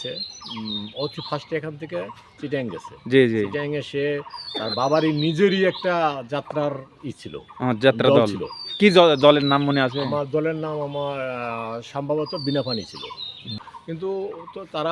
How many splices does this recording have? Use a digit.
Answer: 0